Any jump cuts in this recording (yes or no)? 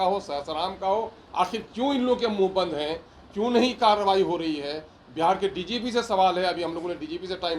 yes